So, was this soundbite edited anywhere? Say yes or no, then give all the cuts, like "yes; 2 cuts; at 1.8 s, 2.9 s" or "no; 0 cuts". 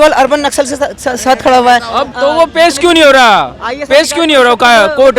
yes; 1 cut; at 2.0 s